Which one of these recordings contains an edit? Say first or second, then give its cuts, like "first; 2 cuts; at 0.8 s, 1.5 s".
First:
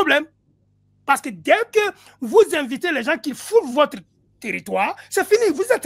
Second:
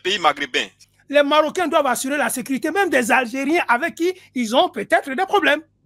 second; 1 cut; at 0.9 s